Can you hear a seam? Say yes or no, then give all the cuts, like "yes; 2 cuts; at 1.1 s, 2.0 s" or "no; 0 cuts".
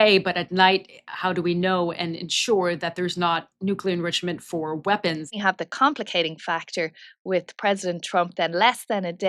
yes; 1 cut; at 5.4 s